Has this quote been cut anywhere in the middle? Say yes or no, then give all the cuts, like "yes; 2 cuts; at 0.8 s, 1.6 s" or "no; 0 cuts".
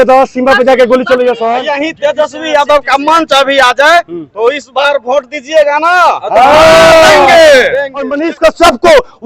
yes; 2 cuts; at 1.6 s, 8.2 s